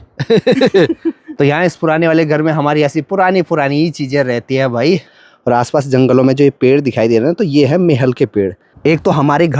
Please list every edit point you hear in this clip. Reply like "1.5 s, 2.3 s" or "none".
5.1 s, 8.7 s